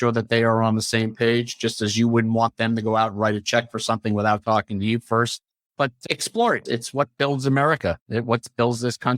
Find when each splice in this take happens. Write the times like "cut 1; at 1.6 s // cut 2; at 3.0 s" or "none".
cut 1; at 5.7 s